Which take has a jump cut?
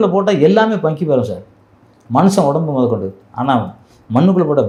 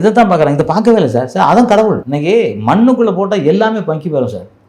second; 1 cut; at 2.1 s

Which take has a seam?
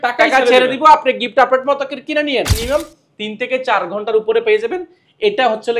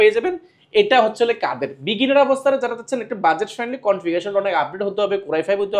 first; 1 cut; at 2.6 s

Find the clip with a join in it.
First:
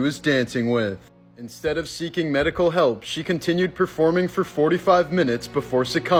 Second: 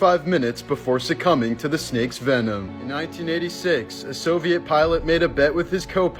second; 1 cut; at 2.7 s

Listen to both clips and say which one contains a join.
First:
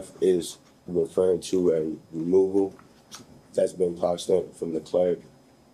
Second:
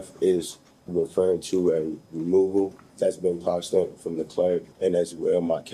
second; 2 cuts; at 2.8 s, 4.7 s

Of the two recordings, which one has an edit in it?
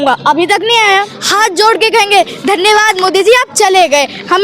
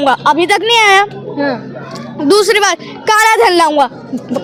first; 1 cut; at 1.2 s

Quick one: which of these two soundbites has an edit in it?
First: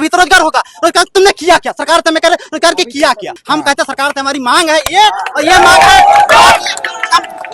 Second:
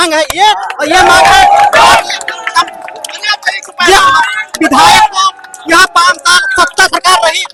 first; 1 cut; at 3.3 s

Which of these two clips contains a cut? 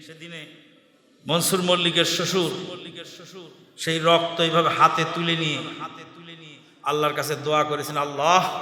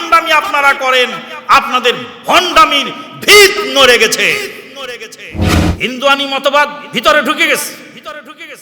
second; 1 cut; at 5.6 s

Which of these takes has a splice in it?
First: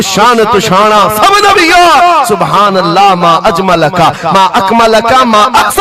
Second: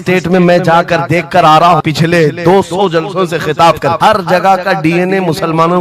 second; 2 cuts; at 1.8 s, 4.0 s

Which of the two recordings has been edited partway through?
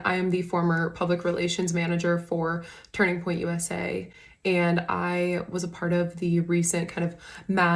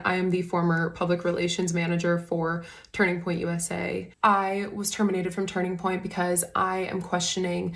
second; 1 cut; at 4.1 s

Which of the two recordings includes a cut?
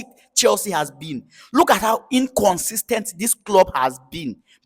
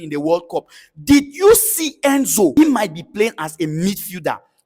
second; 1 cut; at 2.5 s

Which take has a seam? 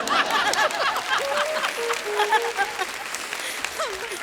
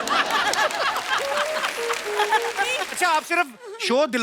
second; 1 cut; at 2.9 s

